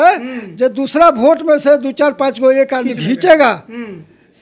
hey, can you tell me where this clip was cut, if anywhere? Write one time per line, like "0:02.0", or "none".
none

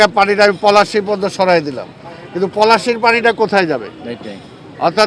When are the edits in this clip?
none

